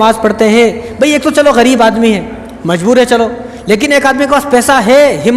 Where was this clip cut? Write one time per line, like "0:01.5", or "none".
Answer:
none